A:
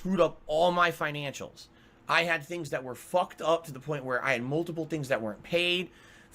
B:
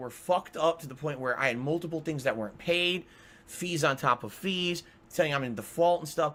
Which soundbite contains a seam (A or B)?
A